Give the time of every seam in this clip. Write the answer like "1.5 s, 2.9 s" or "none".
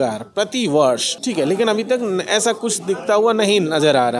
1.1 s